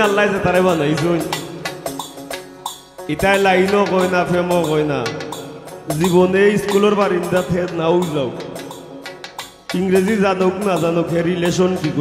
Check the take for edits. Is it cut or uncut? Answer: uncut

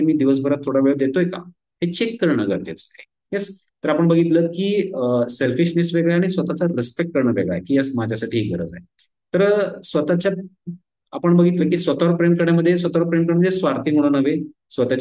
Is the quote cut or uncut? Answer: uncut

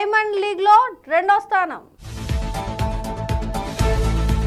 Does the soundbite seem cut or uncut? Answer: uncut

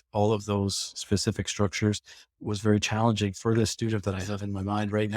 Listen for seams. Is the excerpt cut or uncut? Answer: cut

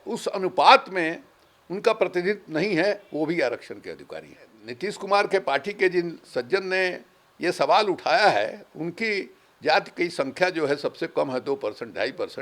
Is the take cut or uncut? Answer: cut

